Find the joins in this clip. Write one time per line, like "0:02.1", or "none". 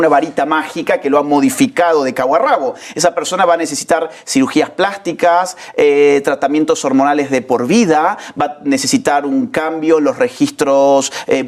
none